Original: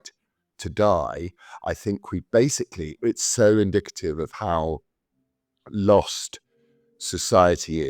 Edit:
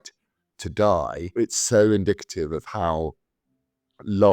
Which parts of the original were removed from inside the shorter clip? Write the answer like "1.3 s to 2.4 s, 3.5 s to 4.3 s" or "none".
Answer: 1.2 s to 2.9 s